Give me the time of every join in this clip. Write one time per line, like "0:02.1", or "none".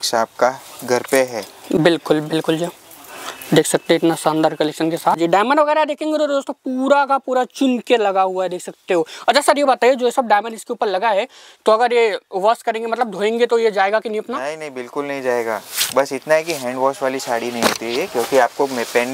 none

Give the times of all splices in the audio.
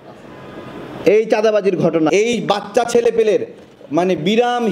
0:02.1

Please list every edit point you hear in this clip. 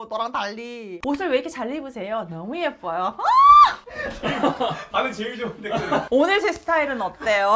0:01.0

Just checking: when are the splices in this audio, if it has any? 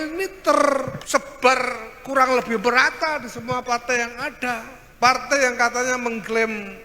0:01.0
0:04.8

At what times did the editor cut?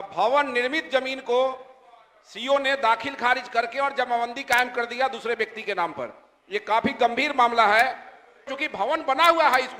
0:08.6

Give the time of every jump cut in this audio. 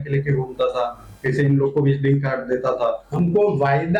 0:03.0

